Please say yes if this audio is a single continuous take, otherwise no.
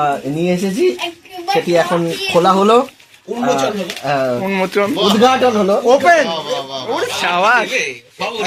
yes